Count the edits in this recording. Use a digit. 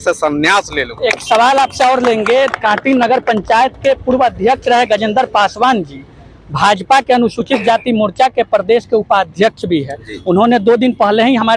0